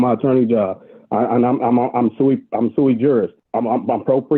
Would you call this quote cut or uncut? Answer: cut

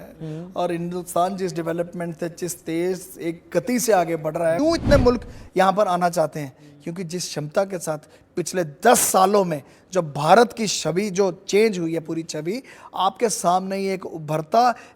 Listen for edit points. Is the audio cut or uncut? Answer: cut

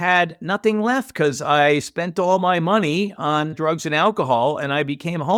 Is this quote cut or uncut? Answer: uncut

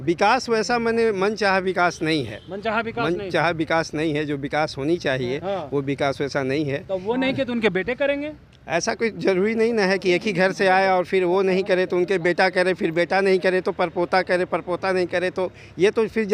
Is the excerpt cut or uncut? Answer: uncut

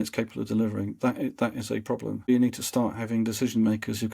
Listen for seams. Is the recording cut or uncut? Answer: cut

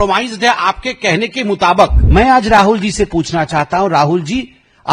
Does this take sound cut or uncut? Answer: cut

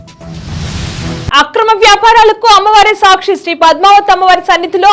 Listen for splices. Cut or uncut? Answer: cut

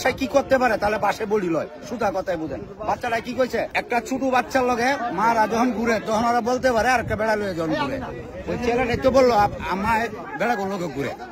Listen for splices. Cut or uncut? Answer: cut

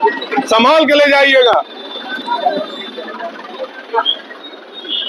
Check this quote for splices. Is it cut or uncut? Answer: uncut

